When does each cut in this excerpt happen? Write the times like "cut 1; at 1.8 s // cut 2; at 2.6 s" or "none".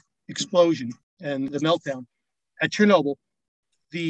cut 1; at 1.4 s